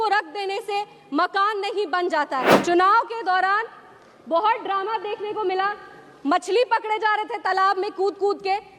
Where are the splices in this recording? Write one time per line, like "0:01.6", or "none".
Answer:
0:02.5

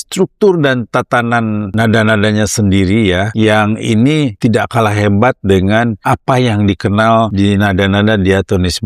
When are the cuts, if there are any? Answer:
0:01.7
0:03.3
0:04.3
0:06.0
0:07.3

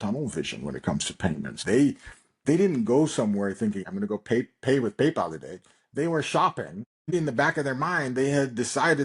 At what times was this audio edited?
0:01.6
0:03.8
0:07.1

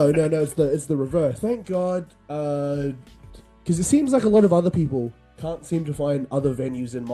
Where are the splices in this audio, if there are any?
0:01.4

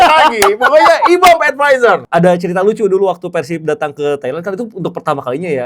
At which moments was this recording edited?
0:02.0

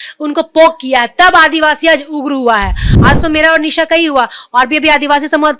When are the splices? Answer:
0:02.9

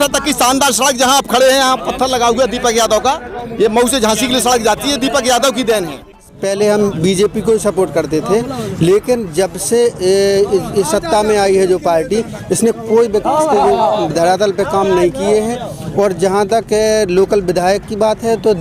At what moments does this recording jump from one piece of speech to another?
0:06.2

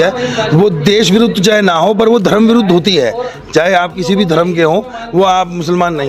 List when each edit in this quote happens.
none

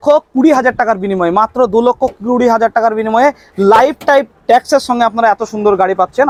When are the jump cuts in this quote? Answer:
none

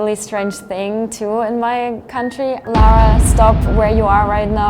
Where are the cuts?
0:02.6

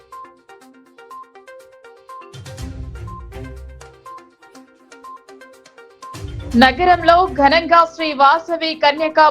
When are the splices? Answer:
0:01.4

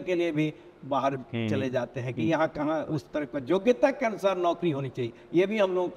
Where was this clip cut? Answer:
none

